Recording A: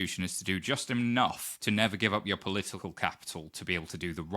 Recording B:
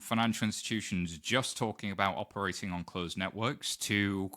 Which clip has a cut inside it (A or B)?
A